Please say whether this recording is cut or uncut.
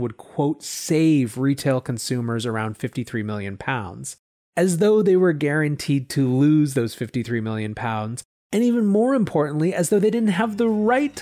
uncut